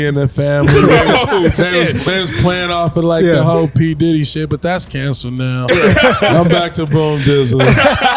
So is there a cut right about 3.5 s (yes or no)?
no